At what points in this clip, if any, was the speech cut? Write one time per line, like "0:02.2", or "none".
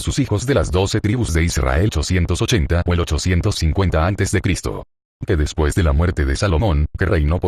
none